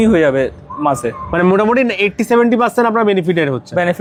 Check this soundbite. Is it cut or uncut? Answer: uncut